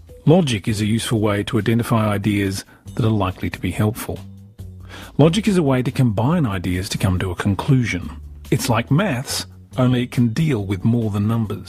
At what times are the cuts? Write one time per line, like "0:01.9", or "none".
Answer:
0:01.1